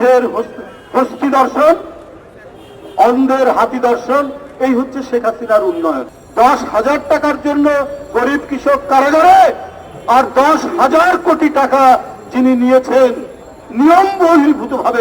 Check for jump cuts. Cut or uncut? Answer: cut